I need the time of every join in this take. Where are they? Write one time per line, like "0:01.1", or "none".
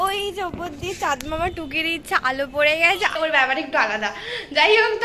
0:03.1